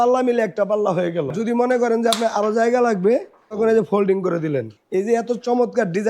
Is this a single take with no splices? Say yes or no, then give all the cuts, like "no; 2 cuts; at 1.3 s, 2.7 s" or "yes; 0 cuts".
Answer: no; 3 cuts; at 1.3 s, 3.6 s, 4.8 s